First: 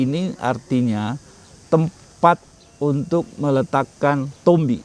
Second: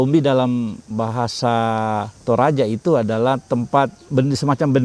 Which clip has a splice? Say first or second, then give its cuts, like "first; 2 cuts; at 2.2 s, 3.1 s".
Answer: second; 2 cuts; at 2.1 s, 4.1 s